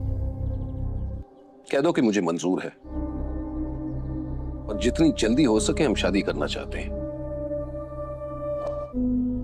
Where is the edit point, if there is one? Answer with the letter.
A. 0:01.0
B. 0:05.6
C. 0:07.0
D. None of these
A